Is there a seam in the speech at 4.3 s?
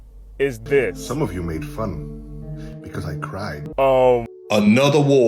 yes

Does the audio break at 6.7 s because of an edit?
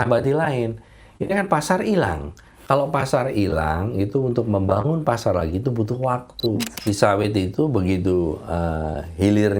yes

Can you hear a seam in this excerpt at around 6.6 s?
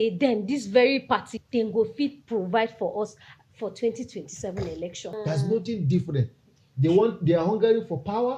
no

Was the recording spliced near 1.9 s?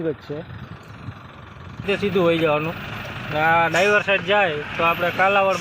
yes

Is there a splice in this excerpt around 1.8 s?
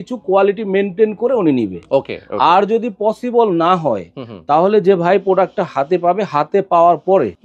no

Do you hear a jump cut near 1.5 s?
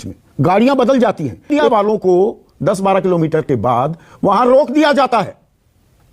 yes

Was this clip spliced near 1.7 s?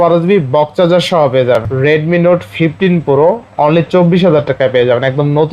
yes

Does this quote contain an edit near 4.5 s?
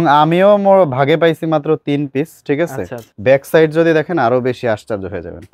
no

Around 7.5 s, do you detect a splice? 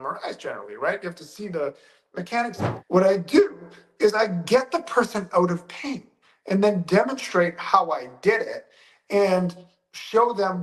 no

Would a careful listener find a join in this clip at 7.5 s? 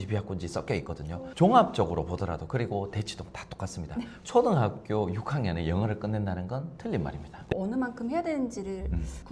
yes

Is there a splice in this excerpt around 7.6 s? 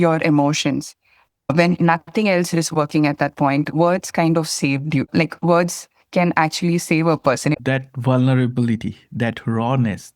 yes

